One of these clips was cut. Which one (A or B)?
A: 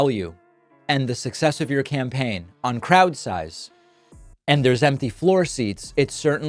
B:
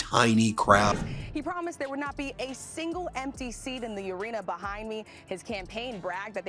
B